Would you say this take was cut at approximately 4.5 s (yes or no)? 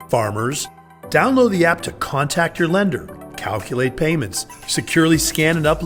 no